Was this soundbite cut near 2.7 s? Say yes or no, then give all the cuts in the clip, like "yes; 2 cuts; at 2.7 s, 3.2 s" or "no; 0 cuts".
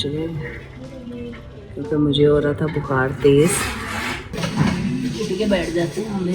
no; 1 cut; at 4.3 s